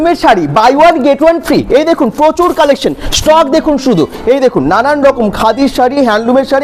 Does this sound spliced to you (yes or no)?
no